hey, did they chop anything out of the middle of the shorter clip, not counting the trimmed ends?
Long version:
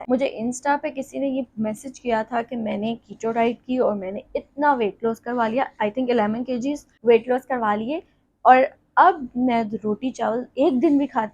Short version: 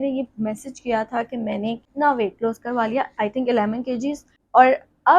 yes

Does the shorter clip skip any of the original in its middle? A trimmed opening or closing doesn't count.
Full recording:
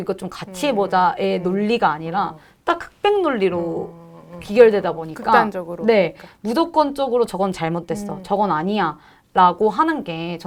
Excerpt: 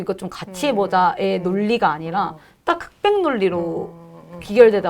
no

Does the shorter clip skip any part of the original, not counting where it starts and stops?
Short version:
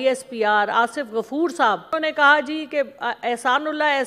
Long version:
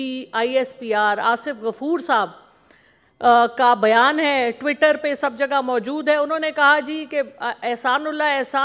yes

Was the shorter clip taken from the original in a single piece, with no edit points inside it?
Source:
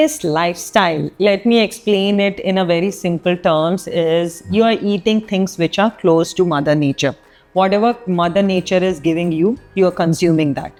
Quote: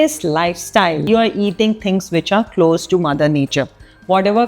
no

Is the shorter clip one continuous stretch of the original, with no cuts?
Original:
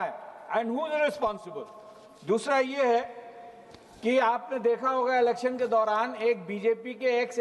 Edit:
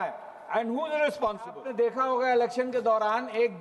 no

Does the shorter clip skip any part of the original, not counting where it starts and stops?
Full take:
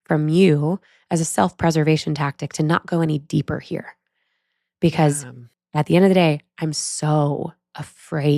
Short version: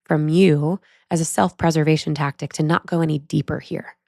no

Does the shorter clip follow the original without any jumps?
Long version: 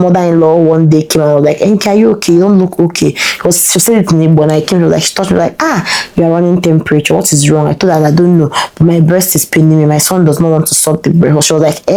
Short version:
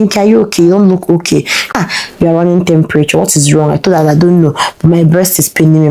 no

